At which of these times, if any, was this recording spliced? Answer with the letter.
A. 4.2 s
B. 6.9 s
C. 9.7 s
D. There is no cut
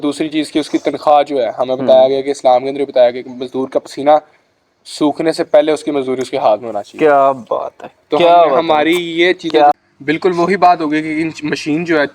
C